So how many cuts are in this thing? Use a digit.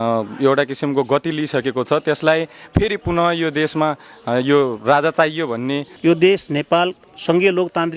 1